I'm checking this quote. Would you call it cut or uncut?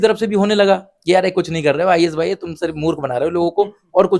uncut